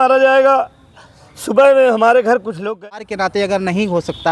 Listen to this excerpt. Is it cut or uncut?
cut